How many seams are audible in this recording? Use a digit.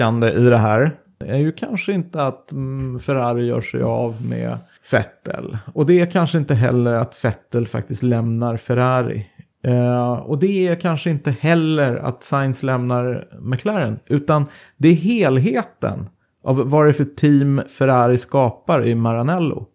2